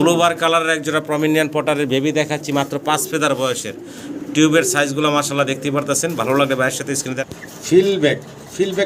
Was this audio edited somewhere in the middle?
yes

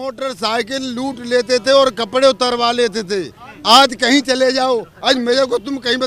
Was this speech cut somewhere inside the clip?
no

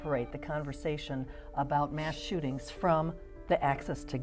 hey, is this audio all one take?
yes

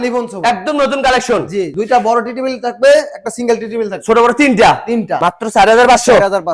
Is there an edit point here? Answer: yes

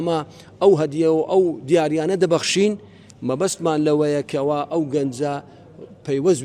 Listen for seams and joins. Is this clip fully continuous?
yes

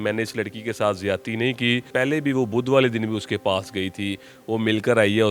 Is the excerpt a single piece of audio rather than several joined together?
no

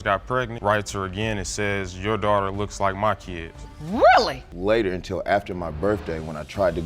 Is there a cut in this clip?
yes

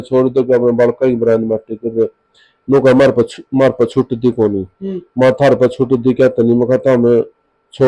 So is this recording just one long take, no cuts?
yes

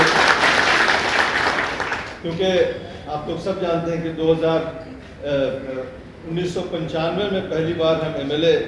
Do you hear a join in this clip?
no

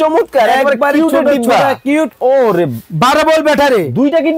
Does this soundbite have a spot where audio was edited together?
yes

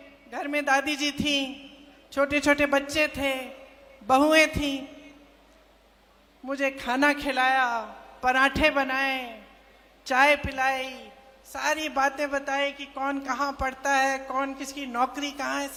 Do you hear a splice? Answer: no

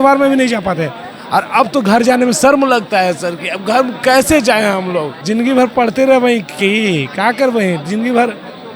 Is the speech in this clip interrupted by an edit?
yes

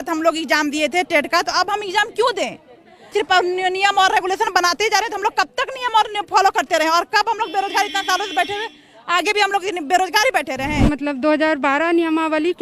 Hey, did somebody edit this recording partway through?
yes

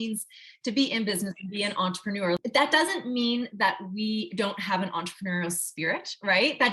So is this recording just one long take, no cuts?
no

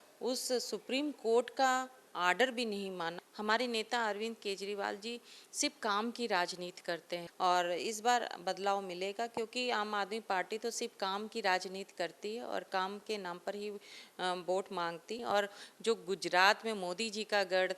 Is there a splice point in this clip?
yes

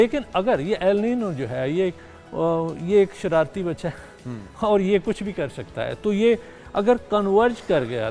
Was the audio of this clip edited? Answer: no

